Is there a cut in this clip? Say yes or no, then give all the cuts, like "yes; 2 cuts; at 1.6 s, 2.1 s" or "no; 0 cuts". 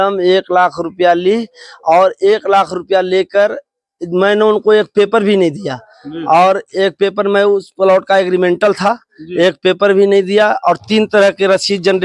no; 0 cuts